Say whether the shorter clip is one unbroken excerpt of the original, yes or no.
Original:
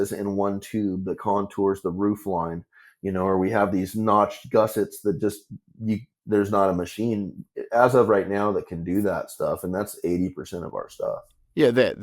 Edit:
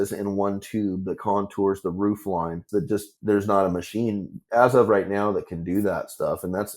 no